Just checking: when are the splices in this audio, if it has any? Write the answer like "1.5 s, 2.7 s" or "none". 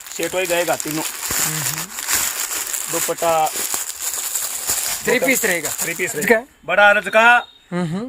6.2 s